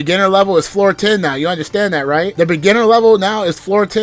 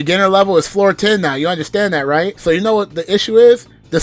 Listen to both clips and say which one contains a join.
second; 1 cut; at 2.3 s

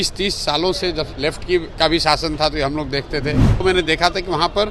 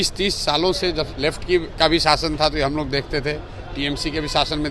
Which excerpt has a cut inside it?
first; 1 cut; at 3.6 s

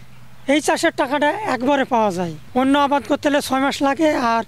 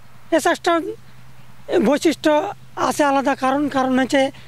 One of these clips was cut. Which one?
first; 1 cut; at 2.3 s

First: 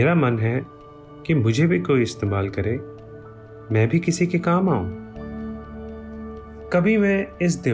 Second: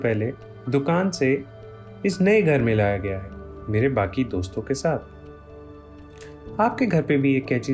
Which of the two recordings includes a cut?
second; 1 cut; at 3.1 s

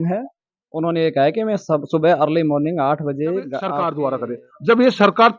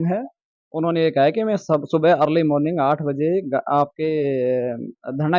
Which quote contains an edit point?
first; 1 cut; at 3.7 s

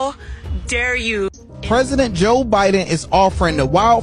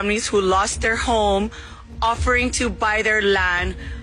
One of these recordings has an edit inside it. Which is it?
first; 1 cut; at 1.4 s

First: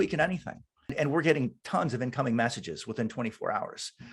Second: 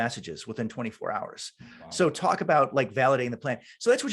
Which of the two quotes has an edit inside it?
first; 1 cut; at 0.9 s

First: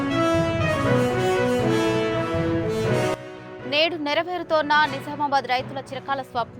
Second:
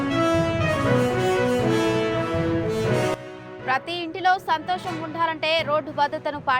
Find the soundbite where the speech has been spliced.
first; 1 cut; at 3.2 s

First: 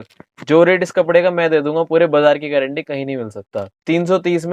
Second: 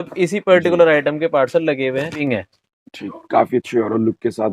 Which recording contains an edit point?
second; 1 cut; at 2.2 s

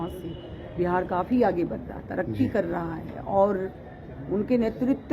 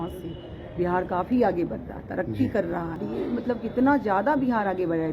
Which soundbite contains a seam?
second; 1 cut; at 3.0 s

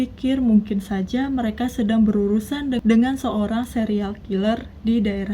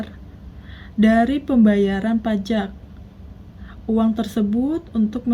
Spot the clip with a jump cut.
first; 1 cut; at 2.8 s

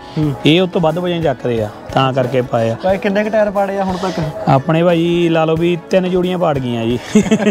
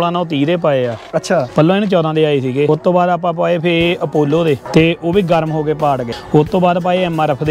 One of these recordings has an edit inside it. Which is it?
second; 4 cuts; at 1.5 s, 2.7 s, 4.6 s, 6.1 s

